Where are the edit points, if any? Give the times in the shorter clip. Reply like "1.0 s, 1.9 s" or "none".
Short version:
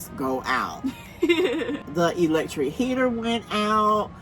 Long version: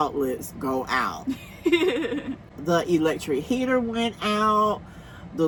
1.8 s